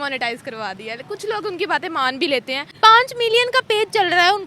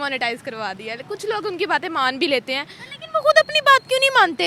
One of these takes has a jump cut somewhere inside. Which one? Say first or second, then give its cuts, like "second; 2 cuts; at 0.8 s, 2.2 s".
first; 1 cut; at 2.6 s